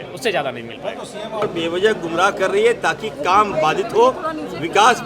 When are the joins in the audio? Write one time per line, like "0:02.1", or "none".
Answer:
0:01.4